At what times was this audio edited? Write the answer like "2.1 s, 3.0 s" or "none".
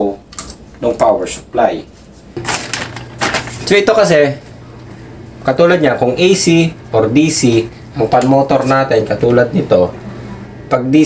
2.4 s